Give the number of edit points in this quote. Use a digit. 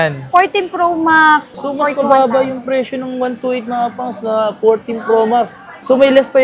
1